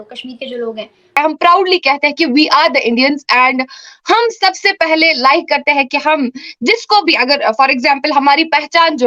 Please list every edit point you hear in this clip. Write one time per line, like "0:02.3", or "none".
0:01.2

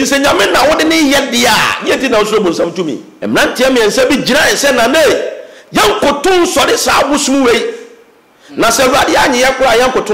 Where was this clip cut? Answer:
0:03.1

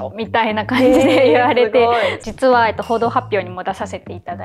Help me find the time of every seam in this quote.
0:02.2

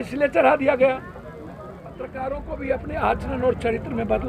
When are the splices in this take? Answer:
0:02.1

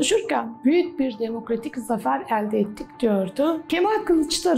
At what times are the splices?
0:03.6

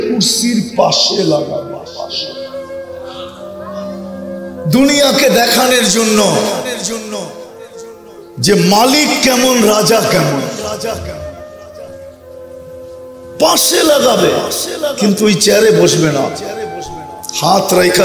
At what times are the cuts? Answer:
0:02.1
0:04.2

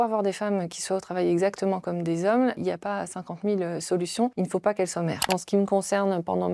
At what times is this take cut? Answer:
0:02.6
0:04.3
0:05.3

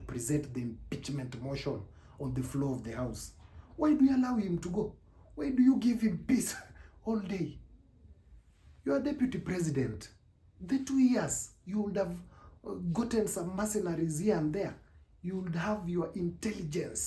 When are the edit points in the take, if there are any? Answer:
none

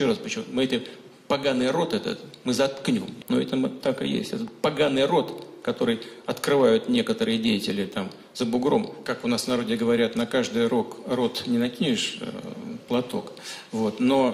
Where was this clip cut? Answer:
0:03.1
0:09.0

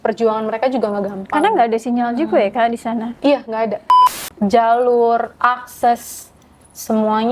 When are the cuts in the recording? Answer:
0:03.9

